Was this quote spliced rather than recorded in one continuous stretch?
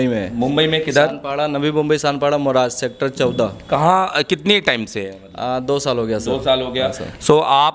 no; 0 cuts

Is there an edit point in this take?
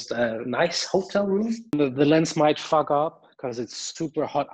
yes; 1 cut; at 1.7 s

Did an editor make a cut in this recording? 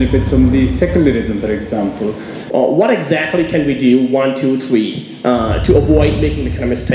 yes; 1 cut; at 2.3 s

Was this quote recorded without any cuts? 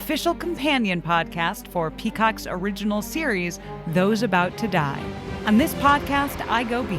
no; 1 cut; at 5.3 s

